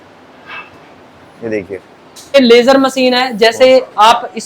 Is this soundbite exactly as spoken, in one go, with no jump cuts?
no; 1 cut; at 2.3 s

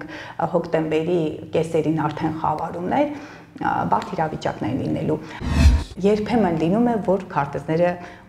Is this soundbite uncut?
no; 1 cut; at 5.4 s

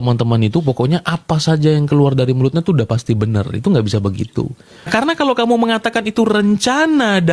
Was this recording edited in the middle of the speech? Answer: yes; 1 cut; at 4.9 s

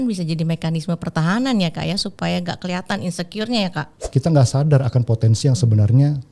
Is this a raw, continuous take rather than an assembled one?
no; 1 cut; at 4.0 s

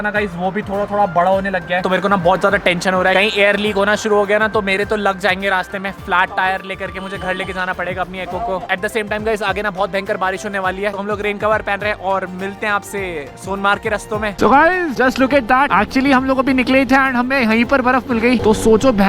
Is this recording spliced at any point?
no; 0 cuts

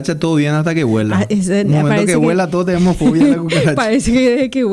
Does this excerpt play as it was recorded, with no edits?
no; 1 cut; at 2.0 s

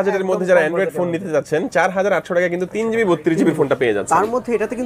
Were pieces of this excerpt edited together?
no; 0 cuts

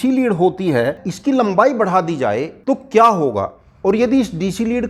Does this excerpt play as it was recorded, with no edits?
no; 3 cuts; at 1.1 s, 2.5 s, 3.6 s

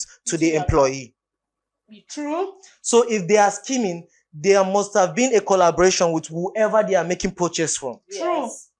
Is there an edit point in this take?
no; 0 cuts

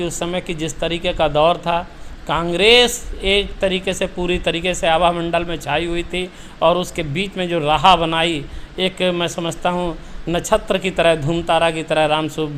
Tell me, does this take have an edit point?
no; 0 cuts

